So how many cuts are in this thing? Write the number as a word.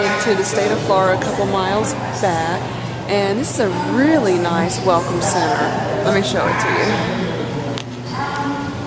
zero